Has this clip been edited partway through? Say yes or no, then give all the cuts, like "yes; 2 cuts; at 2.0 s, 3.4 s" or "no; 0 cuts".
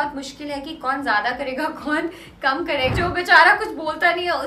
yes; 1 cut; at 2.9 s